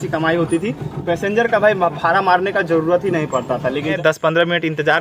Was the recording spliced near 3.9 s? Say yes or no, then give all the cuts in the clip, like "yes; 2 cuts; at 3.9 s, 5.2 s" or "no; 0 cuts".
yes; 1 cut; at 3.9 s